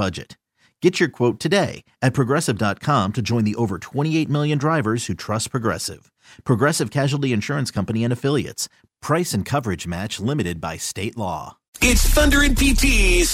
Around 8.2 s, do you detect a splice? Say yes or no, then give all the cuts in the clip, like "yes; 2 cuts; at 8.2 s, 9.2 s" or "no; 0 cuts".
no; 1 cut; at 11.9 s